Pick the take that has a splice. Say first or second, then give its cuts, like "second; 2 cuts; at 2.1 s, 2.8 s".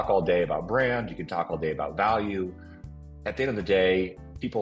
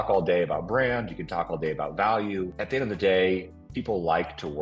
second; 1 cut; at 2.6 s